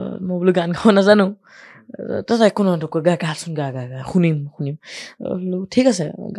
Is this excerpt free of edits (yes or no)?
yes